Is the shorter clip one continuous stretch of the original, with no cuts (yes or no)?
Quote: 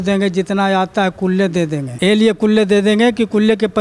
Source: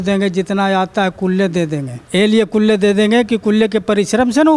no